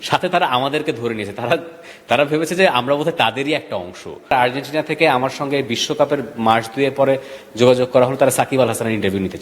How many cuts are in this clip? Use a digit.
1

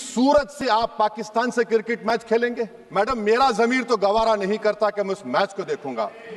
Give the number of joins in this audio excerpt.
1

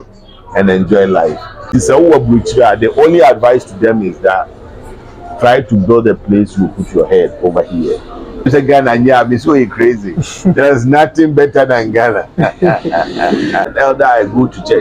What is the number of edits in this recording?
3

